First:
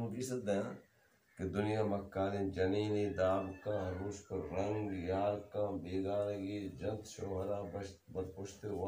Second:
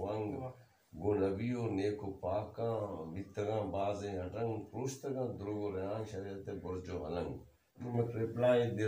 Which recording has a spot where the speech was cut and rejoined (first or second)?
second